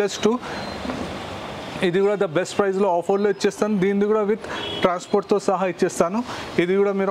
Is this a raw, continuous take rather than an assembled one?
yes; 0 cuts

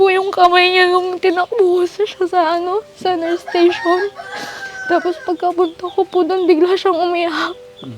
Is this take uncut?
yes; 0 cuts

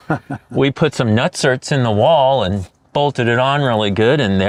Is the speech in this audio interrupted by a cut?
no; 0 cuts

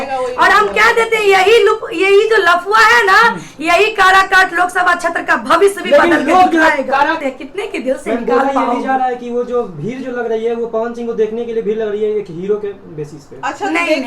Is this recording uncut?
no; 1 cut; at 7.2 s

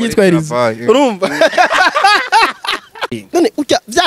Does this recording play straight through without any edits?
no; 1 cut; at 3.2 s

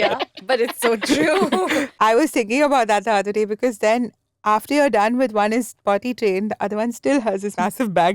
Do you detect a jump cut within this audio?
yes; 1 cut; at 1.9 s

